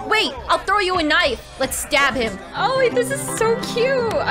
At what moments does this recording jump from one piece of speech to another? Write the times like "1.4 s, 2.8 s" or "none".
2.4 s